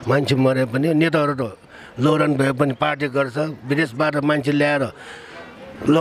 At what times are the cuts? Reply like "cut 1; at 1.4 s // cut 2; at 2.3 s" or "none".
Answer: none